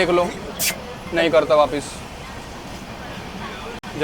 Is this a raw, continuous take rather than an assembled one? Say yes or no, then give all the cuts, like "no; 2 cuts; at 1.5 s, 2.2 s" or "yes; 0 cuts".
yes; 0 cuts